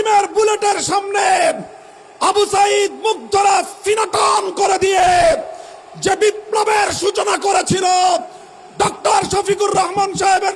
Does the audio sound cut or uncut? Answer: uncut